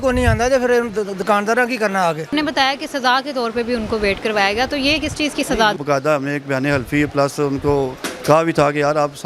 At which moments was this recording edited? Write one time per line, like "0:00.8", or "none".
0:02.3
0:05.8